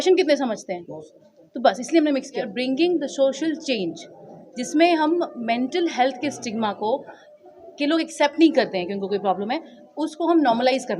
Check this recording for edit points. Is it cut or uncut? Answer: cut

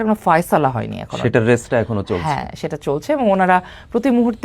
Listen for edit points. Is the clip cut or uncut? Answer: uncut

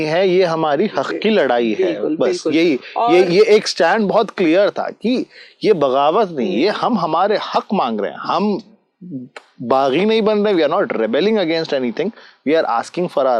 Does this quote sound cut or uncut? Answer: uncut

